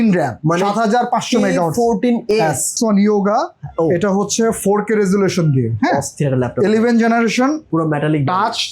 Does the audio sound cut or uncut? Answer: cut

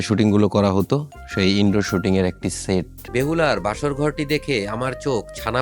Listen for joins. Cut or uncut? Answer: cut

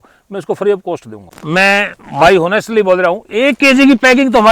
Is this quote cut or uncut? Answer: cut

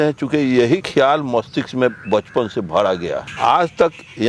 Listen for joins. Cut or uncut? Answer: cut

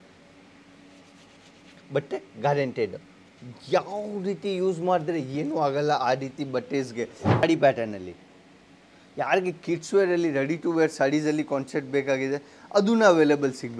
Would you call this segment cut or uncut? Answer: cut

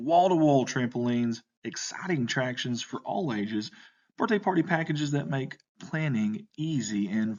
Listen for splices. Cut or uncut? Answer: uncut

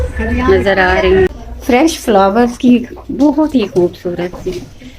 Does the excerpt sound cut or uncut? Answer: cut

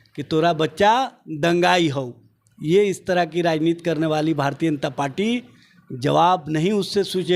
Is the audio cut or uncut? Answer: uncut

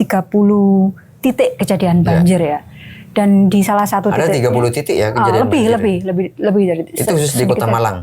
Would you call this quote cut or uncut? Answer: uncut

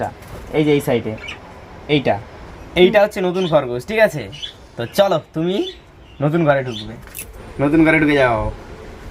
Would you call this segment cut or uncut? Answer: cut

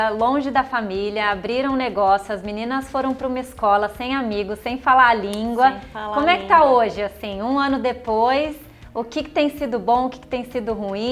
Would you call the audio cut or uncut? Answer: uncut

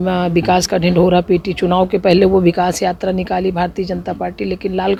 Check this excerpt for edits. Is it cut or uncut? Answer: uncut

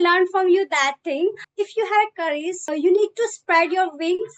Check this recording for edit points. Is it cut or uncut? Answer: cut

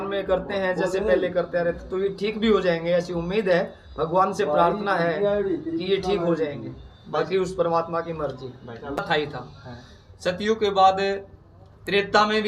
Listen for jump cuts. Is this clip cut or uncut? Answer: cut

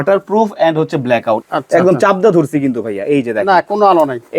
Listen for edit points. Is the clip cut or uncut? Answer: cut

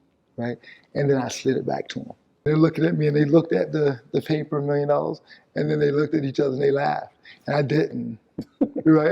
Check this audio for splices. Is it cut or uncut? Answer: cut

